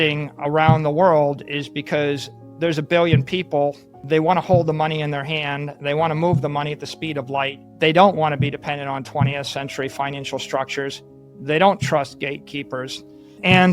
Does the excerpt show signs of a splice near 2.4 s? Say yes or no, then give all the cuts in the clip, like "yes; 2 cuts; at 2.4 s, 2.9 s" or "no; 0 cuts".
no; 2 cuts; at 3.9 s, 7.6 s